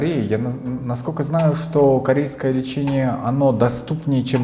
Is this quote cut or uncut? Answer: uncut